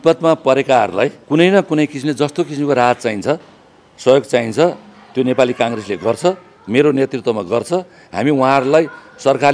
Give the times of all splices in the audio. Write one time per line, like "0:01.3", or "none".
0:01.2